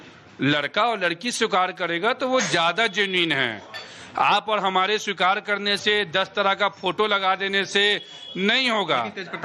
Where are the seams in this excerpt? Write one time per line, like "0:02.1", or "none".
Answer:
0:05.7